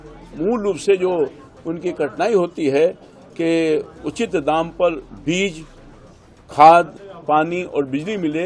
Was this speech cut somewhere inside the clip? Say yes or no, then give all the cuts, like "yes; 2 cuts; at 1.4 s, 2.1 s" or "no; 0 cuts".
no; 0 cuts